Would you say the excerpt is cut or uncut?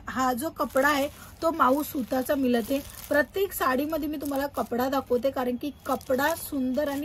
uncut